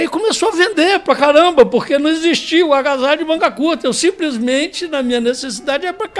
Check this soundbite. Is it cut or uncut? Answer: uncut